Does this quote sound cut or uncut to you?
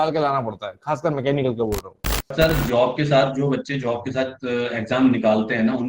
cut